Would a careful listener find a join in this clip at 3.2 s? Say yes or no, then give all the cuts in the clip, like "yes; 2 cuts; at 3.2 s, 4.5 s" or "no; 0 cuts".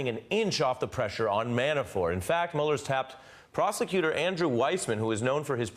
no; 1 cut; at 1.9 s